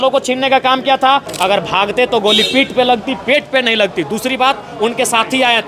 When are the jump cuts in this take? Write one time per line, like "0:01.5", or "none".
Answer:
0:01.3

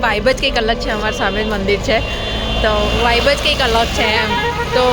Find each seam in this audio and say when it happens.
none

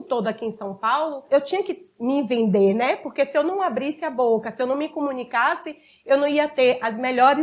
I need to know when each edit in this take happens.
0:01.2

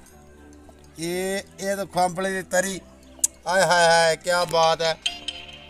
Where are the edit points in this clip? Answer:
none

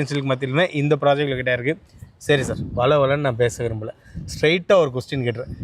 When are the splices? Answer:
none

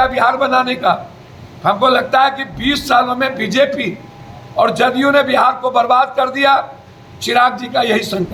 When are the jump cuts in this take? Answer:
none

